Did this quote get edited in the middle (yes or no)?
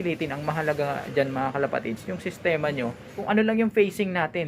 yes